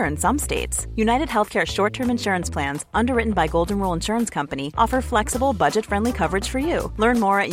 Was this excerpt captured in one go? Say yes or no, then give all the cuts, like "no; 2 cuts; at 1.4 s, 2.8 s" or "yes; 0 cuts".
yes; 0 cuts